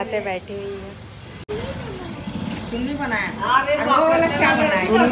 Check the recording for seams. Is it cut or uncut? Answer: uncut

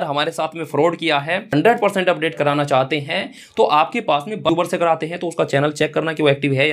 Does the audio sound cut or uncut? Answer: cut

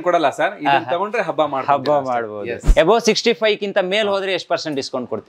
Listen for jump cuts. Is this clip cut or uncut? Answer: cut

